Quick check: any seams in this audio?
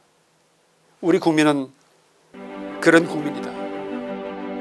yes; 1 cut; at 3.3 s

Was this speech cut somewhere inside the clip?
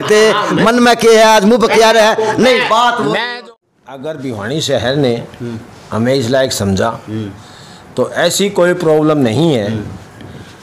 yes; 1 cut; at 3.3 s

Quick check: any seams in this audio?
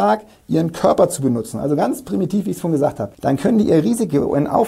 yes; 1 cut; at 3.1 s

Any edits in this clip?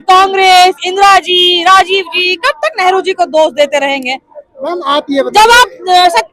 no; 0 cuts

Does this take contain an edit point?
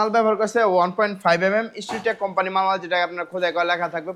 no; 0 cuts

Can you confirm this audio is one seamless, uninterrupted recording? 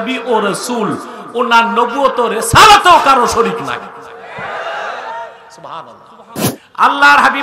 no; 1 cut; at 6.4 s

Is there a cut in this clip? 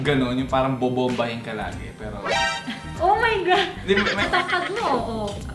yes; 1 cut; at 4.2 s

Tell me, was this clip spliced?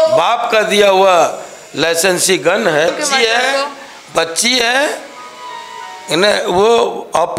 yes; 1 cut; at 2.9 s

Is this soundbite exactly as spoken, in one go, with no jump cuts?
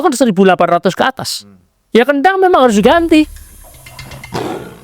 no; 1 cut; at 3.4 s

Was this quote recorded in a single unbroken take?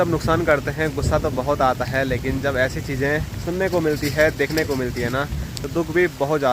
yes; 0 cuts

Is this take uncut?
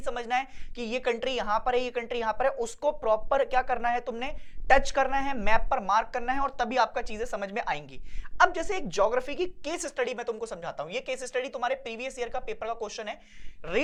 yes; 0 cuts

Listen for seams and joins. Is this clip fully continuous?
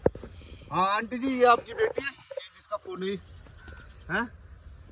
yes; 0 cuts

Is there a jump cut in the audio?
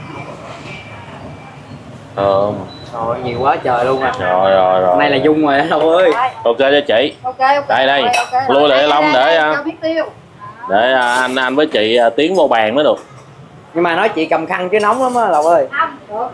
no; 0 cuts

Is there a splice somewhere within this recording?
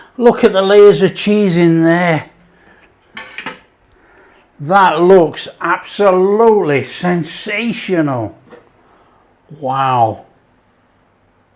no; 0 cuts

